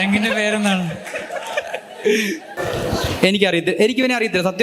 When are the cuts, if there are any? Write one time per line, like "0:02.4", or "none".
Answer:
0:02.5